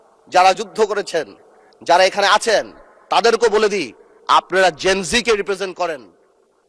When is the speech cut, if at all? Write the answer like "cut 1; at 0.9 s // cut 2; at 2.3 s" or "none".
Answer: none